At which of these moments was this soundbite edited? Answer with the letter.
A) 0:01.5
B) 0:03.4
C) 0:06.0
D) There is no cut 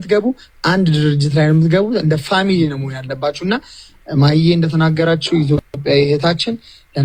D